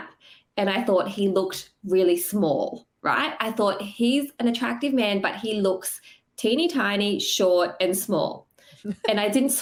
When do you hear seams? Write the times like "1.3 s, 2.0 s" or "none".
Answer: none